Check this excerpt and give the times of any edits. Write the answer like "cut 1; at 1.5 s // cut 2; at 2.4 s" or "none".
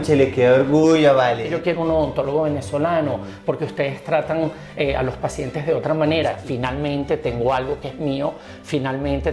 cut 1; at 1.5 s // cut 2; at 6.4 s

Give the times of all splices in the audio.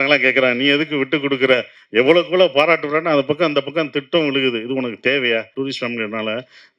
cut 1; at 5.5 s

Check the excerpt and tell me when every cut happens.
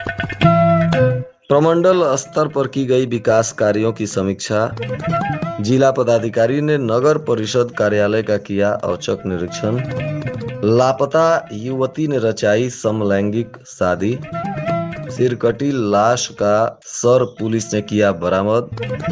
cut 1; at 1.3 s

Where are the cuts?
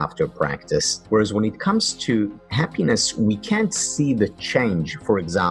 cut 1; at 1.0 s

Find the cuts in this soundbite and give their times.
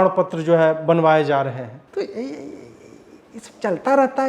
cut 1; at 1.8 s

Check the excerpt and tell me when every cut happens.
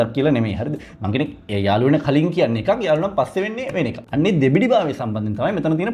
cut 1; at 4.0 s

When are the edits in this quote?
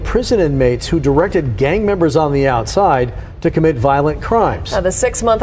none

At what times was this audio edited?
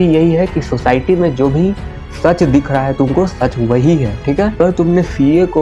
cut 1; at 4.6 s

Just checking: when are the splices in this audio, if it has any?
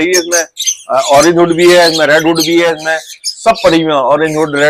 none

